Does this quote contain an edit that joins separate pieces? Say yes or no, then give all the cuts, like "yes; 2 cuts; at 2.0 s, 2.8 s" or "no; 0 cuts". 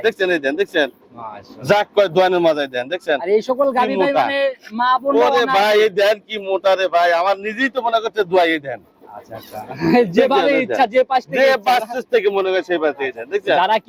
no; 0 cuts